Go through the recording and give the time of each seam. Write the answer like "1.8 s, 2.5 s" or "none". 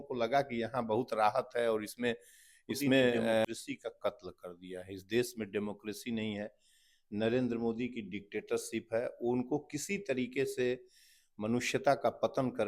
3.5 s